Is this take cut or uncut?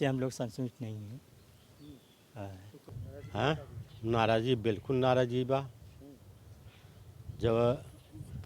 cut